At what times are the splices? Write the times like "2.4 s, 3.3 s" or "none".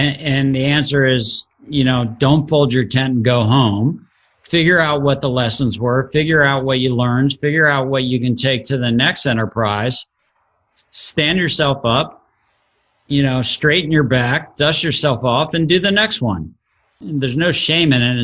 17.0 s